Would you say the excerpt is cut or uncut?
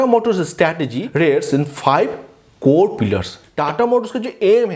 cut